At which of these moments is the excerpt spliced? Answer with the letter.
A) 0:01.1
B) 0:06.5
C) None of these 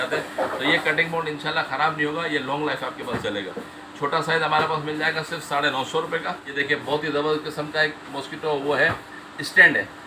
B